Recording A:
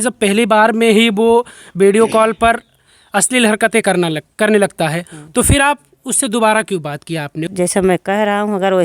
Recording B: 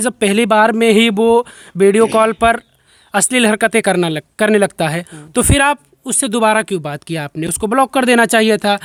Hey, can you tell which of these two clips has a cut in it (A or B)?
A